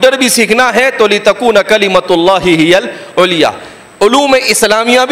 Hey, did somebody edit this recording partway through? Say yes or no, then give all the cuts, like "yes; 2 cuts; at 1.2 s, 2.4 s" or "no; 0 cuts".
no; 0 cuts